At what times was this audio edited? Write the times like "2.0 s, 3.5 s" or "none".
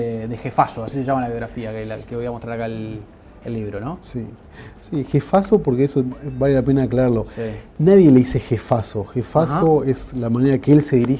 8.8 s